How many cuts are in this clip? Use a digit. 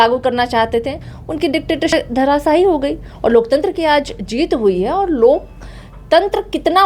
1